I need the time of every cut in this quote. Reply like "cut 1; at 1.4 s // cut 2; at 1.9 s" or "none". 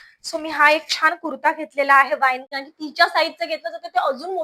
cut 1; at 2.4 s